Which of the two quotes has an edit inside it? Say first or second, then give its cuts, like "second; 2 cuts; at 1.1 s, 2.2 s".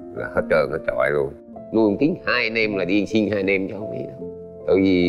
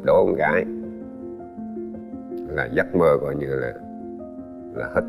first; 1 cut; at 1.4 s